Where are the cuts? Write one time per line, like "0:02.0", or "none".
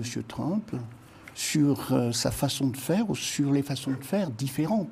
none